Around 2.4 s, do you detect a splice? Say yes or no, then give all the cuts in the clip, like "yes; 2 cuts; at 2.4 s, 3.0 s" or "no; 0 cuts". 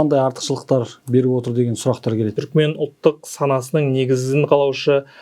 yes; 1 cut; at 2.4 s